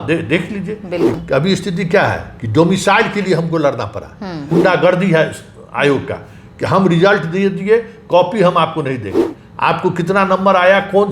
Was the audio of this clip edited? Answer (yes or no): yes